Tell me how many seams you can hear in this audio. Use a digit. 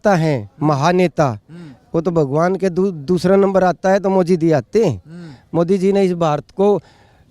0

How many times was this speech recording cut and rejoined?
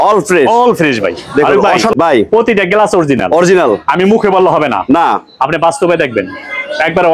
1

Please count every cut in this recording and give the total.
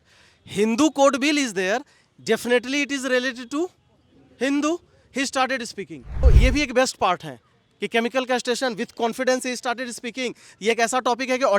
1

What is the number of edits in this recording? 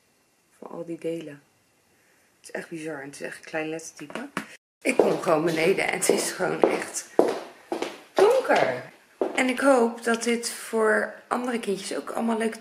2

